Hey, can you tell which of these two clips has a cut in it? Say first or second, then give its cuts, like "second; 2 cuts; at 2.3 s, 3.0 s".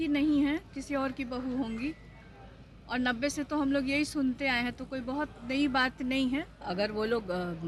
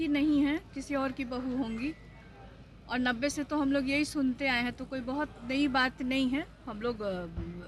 first; 1 cut; at 6.5 s